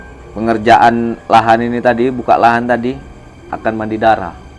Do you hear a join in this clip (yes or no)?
no